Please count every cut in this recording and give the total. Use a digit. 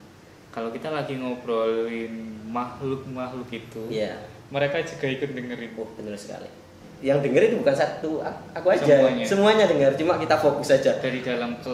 1